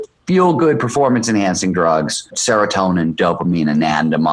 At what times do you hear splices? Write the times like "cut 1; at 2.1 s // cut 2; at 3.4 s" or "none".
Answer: cut 1; at 2.4 s